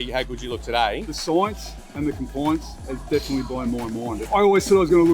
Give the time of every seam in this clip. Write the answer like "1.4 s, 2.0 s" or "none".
1.1 s, 4.2 s